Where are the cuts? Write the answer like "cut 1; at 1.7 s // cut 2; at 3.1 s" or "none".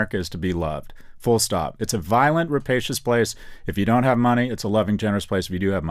none